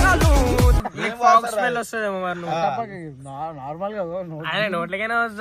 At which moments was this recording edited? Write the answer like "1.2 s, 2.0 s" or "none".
0.9 s